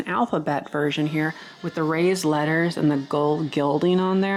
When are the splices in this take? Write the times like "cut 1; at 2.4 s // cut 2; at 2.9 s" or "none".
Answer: none

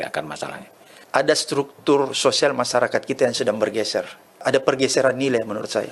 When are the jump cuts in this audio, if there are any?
cut 1; at 1.0 s // cut 2; at 4.4 s

